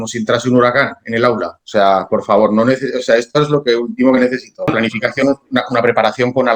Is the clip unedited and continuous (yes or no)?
no